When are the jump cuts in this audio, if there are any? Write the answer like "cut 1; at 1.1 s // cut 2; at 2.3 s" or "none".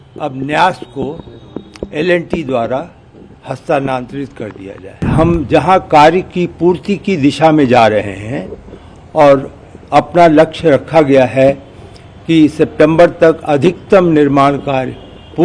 cut 1; at 5.1 s